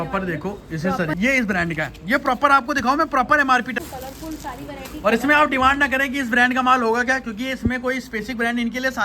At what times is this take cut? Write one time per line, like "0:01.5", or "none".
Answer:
0:01.1
0:03.8

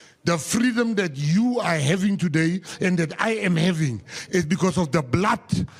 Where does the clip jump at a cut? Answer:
none

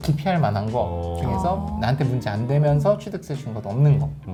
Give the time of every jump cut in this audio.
none

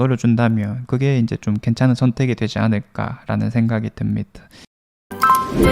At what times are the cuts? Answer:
0:04.5

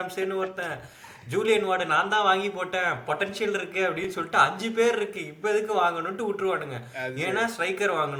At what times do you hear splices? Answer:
none

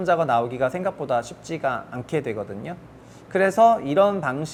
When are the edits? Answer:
none

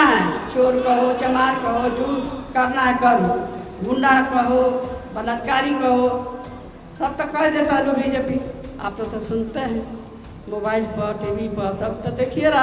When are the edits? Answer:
none

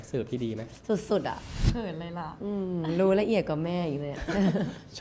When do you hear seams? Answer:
0:01.5

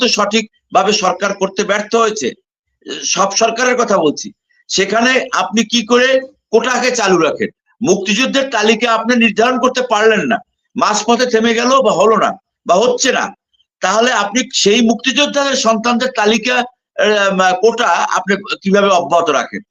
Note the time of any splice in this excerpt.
none

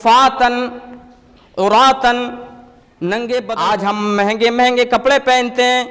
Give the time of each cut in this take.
0:03.6

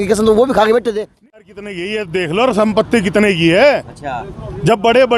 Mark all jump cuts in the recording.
0:01.1

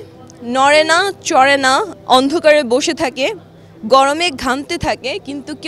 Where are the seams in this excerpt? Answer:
none

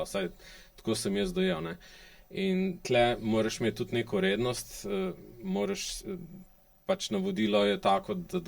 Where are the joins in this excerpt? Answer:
none

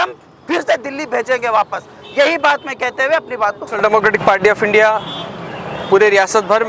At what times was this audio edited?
none

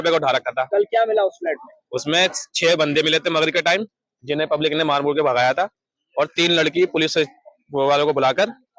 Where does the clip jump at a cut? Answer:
none

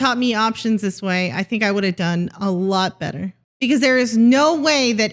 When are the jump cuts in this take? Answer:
0:03.4

